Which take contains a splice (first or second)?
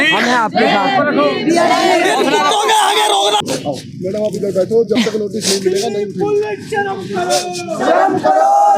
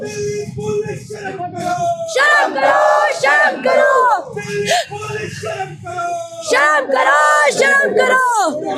first